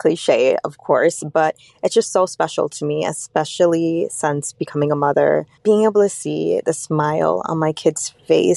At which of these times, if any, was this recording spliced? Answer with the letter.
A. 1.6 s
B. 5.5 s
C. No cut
B